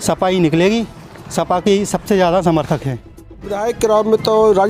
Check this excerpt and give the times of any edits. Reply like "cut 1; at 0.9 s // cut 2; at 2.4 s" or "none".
cut 1; at 3.6 s